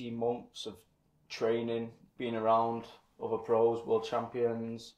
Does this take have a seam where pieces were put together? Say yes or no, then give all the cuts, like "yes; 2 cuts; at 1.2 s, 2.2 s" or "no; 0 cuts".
no; 0 cuts